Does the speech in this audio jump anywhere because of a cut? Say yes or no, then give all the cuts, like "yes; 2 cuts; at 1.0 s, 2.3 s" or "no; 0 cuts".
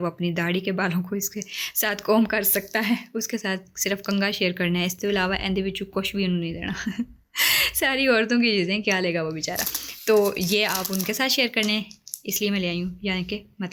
no; 0 cuts